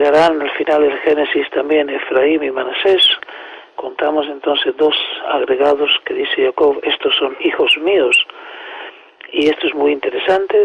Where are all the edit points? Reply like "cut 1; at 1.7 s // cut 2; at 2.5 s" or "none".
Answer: cut 1; at 5.2 s